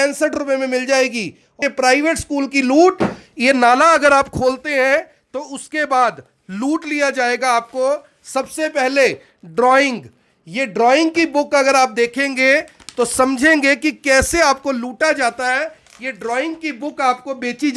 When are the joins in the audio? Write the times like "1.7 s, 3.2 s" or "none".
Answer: 1.5 s